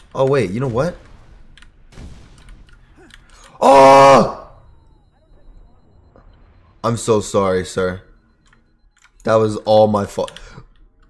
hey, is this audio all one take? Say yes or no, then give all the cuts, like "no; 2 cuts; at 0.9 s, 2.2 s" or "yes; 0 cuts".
yes; 0 cuts